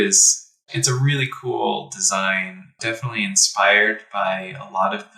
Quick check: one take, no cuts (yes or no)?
no